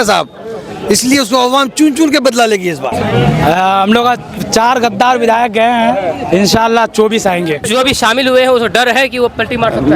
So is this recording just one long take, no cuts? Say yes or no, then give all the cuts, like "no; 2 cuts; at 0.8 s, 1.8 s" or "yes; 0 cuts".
no; 2 cuts; at 2.9 s, 7.7 s